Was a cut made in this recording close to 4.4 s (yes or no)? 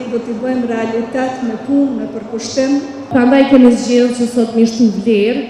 no